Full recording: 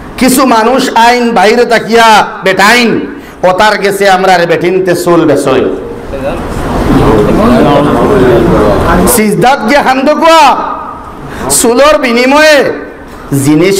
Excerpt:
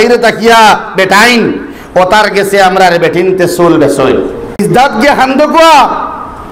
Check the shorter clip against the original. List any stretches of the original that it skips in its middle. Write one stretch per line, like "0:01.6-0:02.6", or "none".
0:06.1-0:09.3